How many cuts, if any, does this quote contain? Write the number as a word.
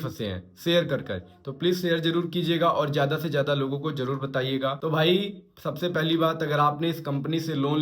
one